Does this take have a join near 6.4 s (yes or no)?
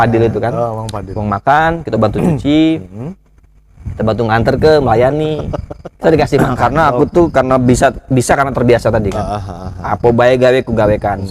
yes